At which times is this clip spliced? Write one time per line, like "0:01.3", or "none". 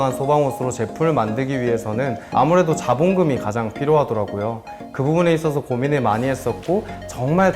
0:02.2